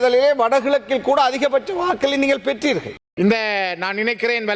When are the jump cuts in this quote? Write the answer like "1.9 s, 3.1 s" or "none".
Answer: 3.0 s